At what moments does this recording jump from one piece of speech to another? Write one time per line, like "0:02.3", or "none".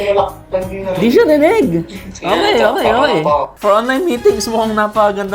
0:03.5

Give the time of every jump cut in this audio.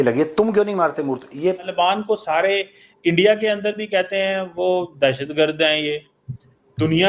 0:01.7

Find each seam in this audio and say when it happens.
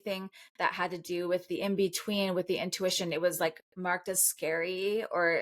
none

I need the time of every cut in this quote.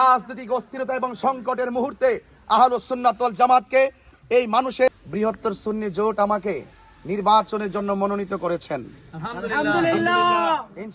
0:04.9

